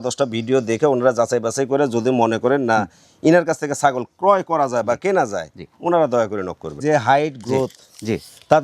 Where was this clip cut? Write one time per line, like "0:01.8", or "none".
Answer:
0:06.8

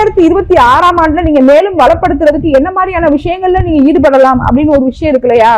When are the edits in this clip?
none

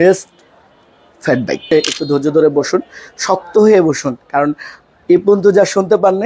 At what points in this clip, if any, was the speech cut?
0:01.6

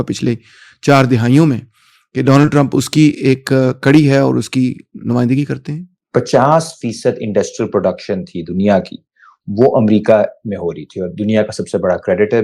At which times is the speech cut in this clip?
0:06.0

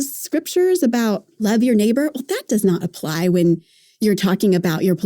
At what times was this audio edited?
0:01.4
0:03.8

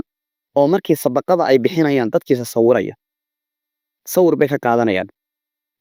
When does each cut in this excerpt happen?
none

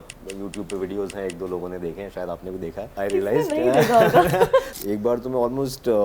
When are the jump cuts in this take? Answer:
0:02.9
0:04.7

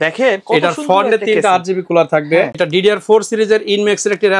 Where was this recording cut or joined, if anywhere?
0:02.6

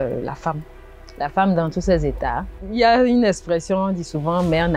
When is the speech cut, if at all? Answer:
0:02.5

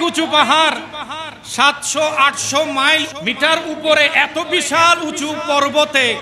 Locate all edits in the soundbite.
0:03.1

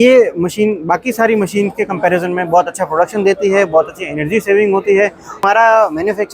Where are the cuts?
0:05.4

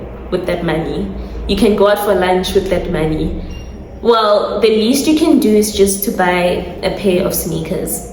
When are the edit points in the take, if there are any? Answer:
none

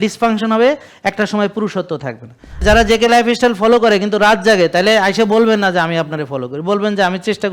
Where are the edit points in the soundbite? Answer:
0:02.6

